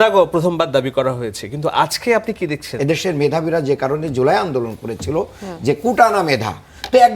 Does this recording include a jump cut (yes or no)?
yes